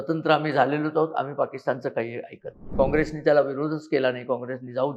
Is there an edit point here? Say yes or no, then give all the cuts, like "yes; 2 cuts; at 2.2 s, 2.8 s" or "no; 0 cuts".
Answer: yes; 1 cut; at 2.7 s